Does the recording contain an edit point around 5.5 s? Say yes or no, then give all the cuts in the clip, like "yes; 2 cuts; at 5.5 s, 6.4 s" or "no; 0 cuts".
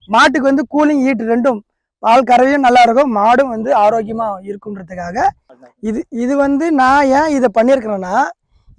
yes; 1 cut; at 5.5 s